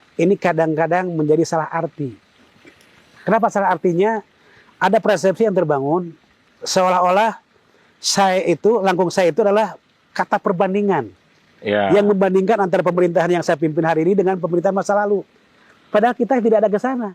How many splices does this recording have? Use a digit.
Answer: 0